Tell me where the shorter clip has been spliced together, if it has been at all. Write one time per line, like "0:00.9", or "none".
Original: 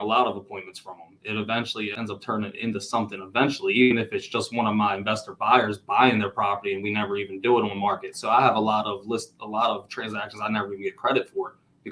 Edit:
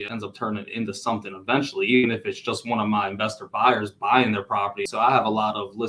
0:04.8